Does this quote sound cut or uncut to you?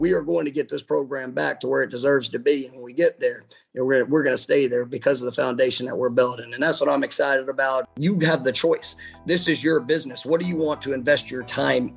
cut